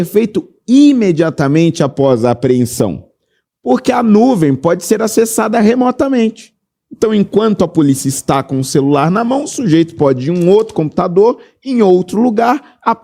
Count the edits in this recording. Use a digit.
0